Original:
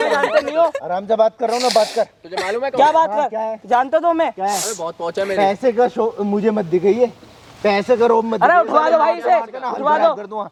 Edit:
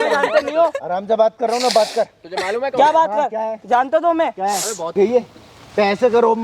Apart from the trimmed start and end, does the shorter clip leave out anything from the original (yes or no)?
yes